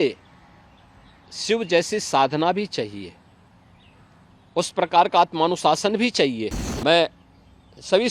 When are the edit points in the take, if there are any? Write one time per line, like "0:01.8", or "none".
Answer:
0:06.6